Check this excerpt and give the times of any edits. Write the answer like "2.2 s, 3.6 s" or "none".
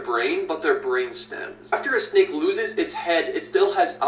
1.7 s

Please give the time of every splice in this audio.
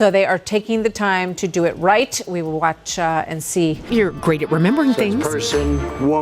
3.8 s

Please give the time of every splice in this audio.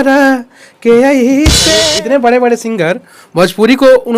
1.6 s

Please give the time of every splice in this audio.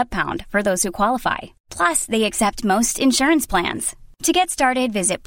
none

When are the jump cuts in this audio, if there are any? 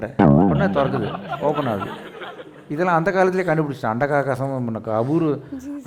none

